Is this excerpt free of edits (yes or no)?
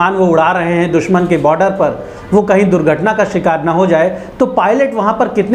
yes